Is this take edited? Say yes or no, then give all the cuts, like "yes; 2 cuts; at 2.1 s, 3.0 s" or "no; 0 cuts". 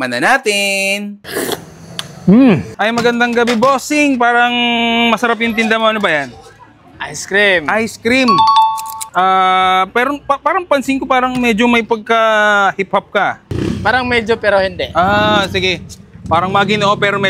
no; 0 cuts